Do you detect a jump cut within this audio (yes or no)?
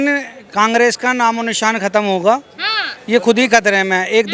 no